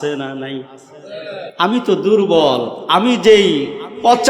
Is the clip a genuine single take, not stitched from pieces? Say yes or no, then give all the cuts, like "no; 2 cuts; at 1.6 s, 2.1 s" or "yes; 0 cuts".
no; 1 cut; at 1.5 s